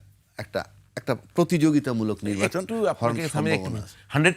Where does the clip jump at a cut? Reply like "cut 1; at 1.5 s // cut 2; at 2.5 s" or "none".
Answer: none